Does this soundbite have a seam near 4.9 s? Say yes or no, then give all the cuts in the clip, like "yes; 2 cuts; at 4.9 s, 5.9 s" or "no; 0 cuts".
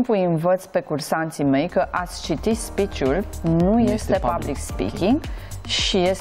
no; 0 cuts